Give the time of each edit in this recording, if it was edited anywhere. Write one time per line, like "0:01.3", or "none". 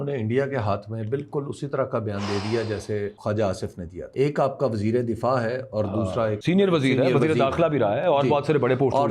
0:03.2
0:04.0
0:06.4